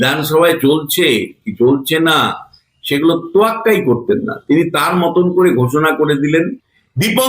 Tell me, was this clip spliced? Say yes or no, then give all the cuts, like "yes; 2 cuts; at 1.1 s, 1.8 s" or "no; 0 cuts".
yes; 1 cut; at 6.4 s